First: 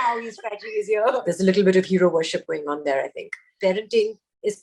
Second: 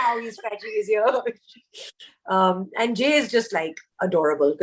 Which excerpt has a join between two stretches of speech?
first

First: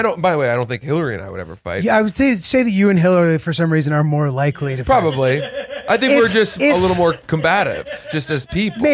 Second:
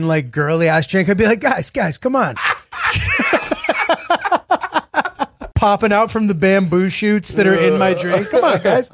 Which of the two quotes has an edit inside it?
second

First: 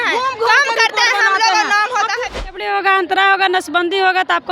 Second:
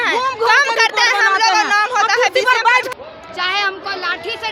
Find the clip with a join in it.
first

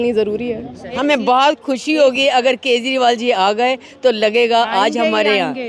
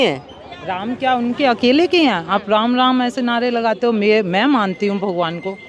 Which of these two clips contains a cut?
first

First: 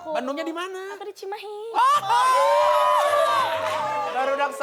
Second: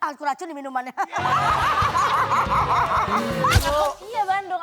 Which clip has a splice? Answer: second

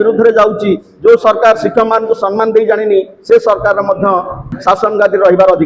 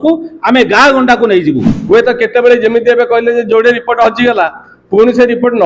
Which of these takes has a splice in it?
second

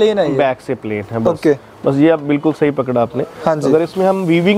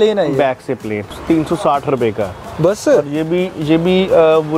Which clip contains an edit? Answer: second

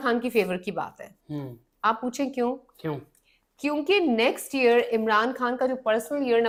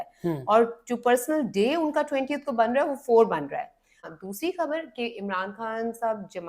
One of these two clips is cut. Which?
second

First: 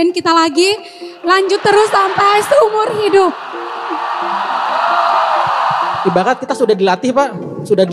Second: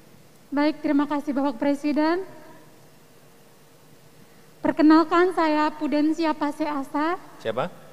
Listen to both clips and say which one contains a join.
first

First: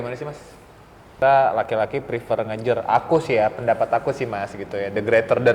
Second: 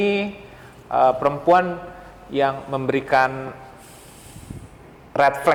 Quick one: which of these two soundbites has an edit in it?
first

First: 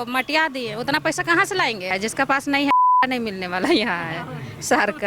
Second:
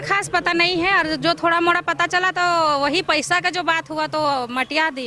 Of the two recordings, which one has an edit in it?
first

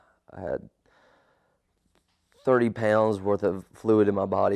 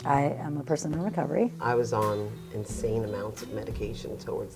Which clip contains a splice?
second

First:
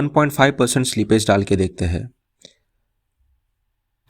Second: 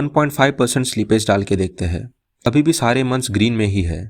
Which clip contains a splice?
second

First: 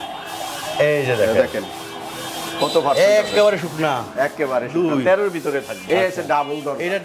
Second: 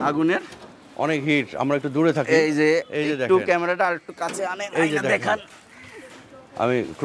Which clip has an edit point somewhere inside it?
first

